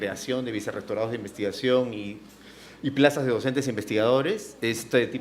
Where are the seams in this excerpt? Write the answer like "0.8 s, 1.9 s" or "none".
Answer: 3.1 s